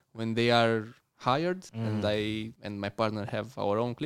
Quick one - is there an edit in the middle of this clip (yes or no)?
yes